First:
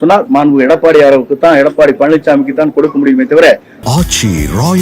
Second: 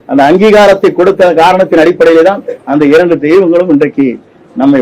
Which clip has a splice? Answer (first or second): first